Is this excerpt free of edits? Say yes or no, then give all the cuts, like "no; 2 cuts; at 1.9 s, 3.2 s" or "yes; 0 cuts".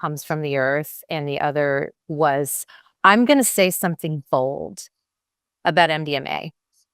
no; 2 cuts; at 2.0 s, 2.6 s